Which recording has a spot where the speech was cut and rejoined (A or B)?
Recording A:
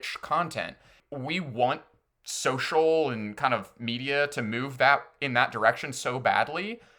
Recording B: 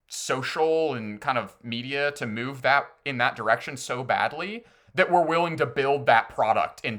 A